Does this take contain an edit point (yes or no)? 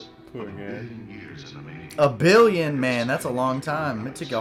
no